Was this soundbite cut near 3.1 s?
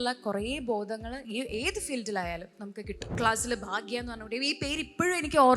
yes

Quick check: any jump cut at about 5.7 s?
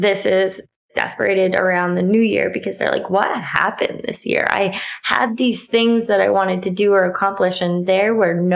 no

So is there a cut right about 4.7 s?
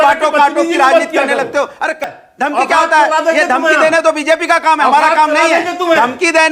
no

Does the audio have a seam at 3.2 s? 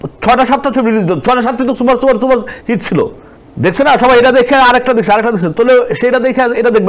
no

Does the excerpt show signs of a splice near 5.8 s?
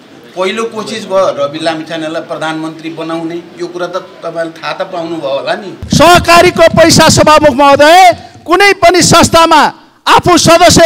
yes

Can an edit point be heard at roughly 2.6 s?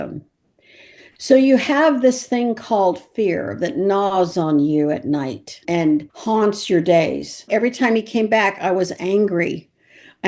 no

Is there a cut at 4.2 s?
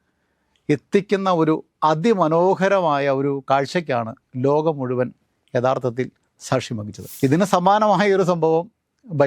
no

